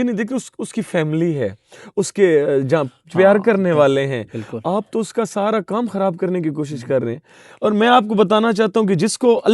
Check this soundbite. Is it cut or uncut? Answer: uncut